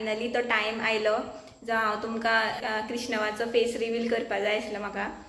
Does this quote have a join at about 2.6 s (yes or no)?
yes